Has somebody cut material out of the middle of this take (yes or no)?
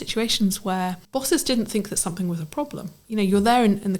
yes